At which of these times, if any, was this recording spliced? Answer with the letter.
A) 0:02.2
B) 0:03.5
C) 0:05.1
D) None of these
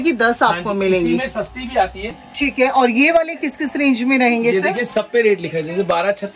A